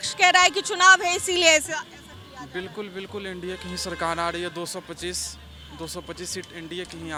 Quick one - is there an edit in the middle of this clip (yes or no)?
no